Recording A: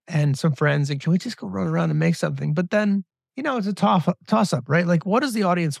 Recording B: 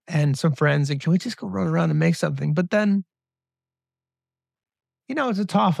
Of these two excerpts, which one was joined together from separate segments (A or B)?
A